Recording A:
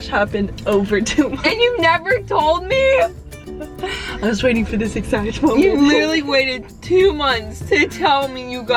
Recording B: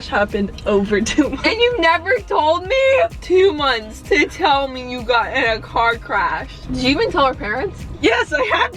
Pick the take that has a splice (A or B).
B